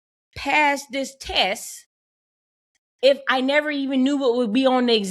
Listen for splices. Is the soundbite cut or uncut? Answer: uncut